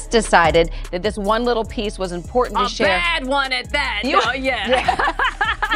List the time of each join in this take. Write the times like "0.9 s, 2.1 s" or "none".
none